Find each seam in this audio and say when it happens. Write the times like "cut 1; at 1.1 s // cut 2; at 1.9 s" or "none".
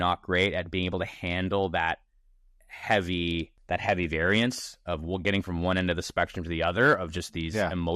cut 1; at 2.2 s // cut 2; at 3.5 s